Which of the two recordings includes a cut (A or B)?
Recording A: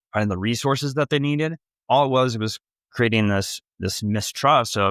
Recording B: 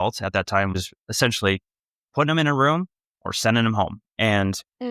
B